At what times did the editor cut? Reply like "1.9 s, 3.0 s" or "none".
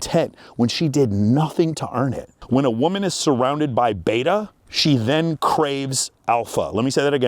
2.4 s